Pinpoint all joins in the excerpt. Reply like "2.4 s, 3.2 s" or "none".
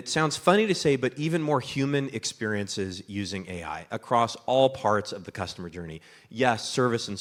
none